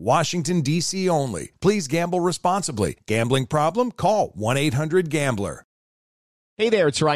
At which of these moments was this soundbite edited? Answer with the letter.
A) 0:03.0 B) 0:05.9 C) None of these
B